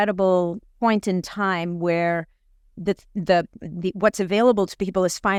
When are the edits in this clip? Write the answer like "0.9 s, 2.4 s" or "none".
none